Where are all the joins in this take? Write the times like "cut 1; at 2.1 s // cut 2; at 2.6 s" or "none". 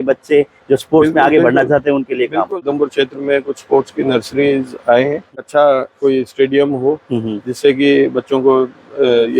cut 1; at 2.6 s // cut 2; at 5.3 s